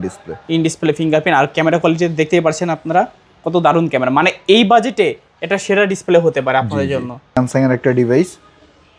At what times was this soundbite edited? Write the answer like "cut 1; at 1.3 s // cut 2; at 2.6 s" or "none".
cut 1; at 7.3 s

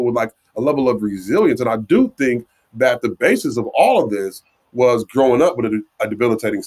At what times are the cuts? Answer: none

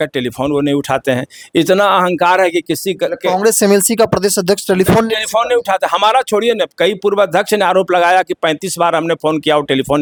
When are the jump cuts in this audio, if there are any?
none

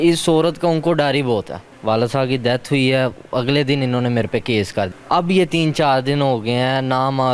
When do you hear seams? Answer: cut 1; at 1.7 s // cut 2; at 4.9 s

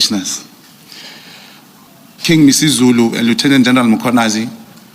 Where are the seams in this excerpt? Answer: cut 1; at 1.9 s

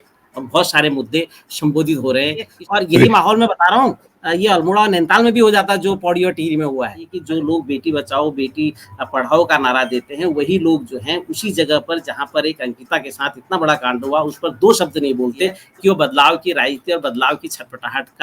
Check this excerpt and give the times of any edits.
cut 1; at 2.5 s // cut 2; at 7.2 s // cut 3; at 15.6 s

